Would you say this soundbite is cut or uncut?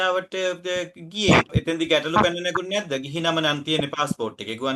cut